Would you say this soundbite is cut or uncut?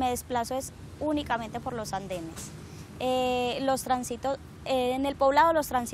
uncut